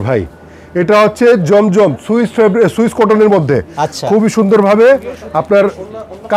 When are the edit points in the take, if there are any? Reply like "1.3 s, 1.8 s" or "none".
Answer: none

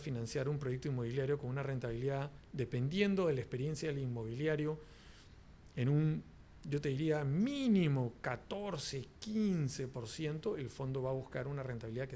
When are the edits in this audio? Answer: none

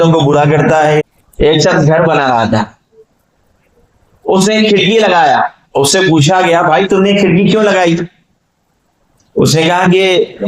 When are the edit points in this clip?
1.0 s

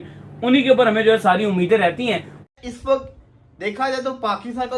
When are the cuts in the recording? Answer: 2.4 s

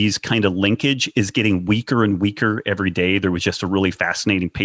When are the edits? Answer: none

